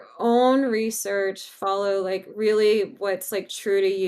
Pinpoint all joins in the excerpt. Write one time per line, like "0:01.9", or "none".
none